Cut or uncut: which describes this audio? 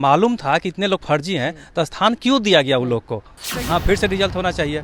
cut